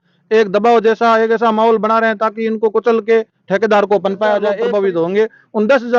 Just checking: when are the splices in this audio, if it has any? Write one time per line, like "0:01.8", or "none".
0:04.6

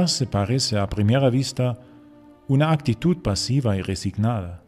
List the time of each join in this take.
0:02.4

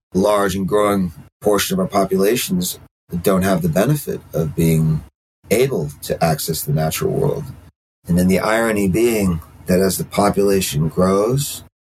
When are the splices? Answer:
0:01.2

